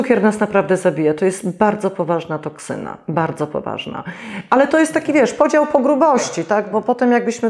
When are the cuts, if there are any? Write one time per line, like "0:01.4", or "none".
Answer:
none